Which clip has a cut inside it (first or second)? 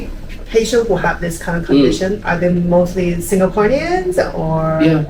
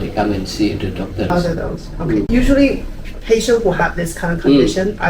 second